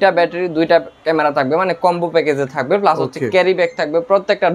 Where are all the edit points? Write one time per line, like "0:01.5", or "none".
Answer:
none